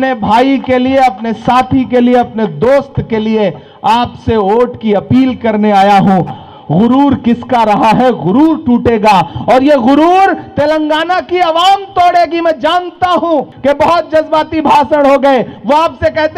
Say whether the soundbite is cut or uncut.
cut